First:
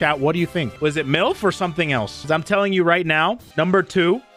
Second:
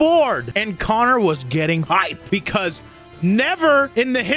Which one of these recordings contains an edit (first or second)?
second